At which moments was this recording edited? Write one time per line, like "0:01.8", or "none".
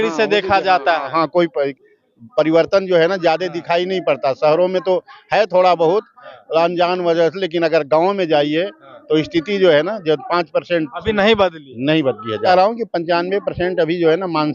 0:12.5